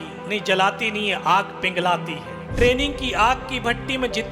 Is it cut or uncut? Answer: cut